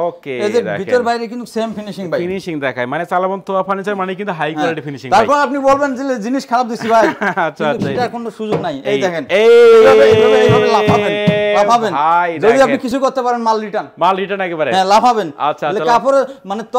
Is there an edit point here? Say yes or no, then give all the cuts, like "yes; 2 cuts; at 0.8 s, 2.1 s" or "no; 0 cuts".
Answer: no; 0 cuts